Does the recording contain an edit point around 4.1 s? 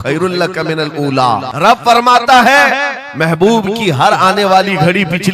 no; 1 cut; at 1.5 s

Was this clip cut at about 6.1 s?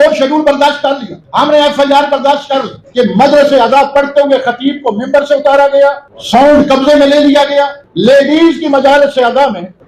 no; 1 cut; at 2.8 s

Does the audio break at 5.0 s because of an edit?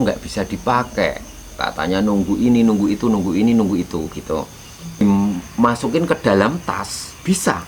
yes; 1 cut; at 5.0 s

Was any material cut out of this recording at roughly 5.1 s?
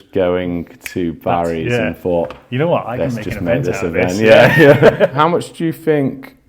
yes; 1 cut; at 5.1 s

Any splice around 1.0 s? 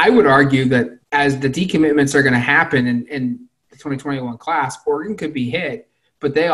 yes; 1 cut; at 1.0 s

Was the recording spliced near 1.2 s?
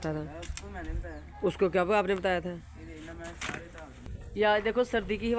no; 1 cut; at 4.1 s

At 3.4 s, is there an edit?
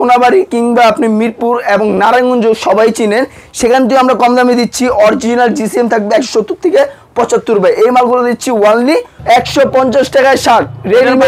no; 1 cut; at 9.1 s

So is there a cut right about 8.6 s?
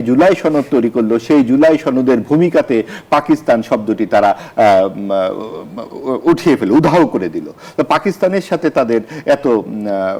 no; 0 cuts

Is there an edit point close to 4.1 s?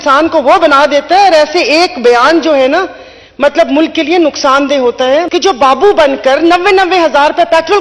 no; 1 cut; at 5.3 s

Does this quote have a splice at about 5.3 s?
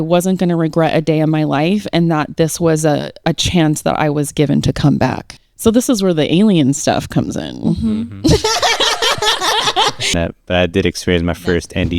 yes; 2 cuts; at 5.3 s, 10.0 s

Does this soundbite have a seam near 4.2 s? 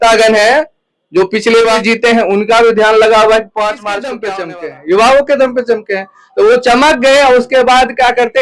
yes; 2 cuts; at 1.8 s, 4.2 s

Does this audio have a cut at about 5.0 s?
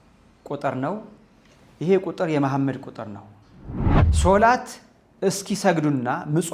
no; 1 cut; at 3.8 s

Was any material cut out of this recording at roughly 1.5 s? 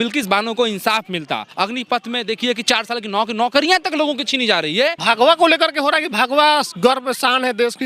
yes; 2 cuts; at 1.5 s, 5.0 s

